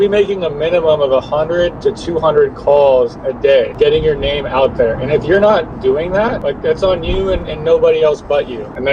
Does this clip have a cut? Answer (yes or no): no